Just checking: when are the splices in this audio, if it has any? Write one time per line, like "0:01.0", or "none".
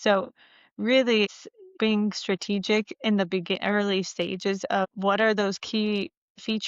0:01.7
0:04.9